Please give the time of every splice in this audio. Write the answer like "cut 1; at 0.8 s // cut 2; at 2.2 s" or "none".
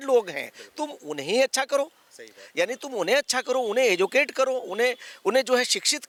none

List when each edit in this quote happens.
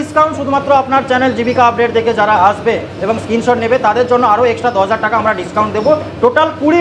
none

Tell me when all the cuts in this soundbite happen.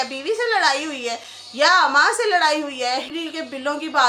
cut 1; at 3.1 s

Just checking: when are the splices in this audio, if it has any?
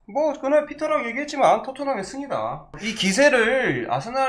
cut 1; at 2.8 s

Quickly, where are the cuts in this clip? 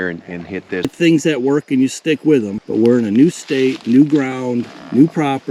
cut 1; at 0.9 s // cut 2; at 2.6 s

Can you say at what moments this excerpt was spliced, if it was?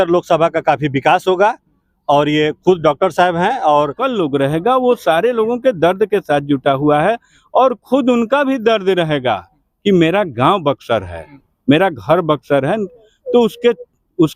cut 1; at 4.0 s

